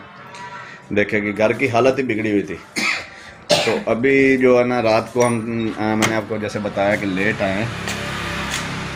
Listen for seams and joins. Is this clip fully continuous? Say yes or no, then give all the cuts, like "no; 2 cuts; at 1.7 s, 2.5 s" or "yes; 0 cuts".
yes; 0 cuts